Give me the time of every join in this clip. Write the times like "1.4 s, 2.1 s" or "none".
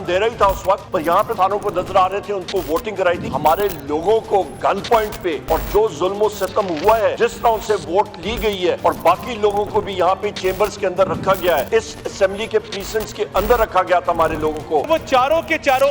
1.2 s, 3.3 s, 5.4 s, 7.1 s, 8.8 s, 11.7 s, 14.9 s